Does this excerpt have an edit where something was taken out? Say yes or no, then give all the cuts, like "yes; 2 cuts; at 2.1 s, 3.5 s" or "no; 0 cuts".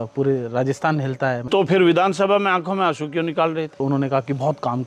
yes; 2 cuts; at 1.4 s, 3.7 s